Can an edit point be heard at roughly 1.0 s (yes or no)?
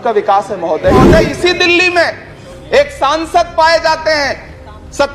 yes